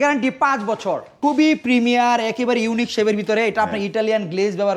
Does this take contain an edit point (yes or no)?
yes